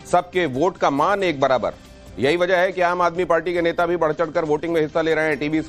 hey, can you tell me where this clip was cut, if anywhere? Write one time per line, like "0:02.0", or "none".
0:03.1